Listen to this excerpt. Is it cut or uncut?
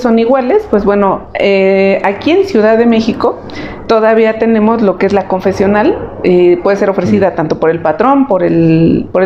uncut